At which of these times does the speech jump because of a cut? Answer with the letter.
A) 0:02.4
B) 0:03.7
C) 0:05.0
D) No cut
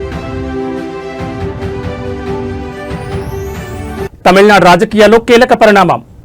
B